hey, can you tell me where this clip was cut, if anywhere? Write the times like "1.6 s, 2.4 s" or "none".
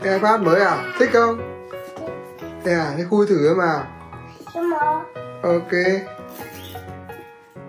6.1 s